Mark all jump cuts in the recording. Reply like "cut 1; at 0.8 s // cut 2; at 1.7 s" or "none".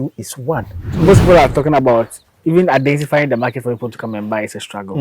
cut 1; at 0.9 s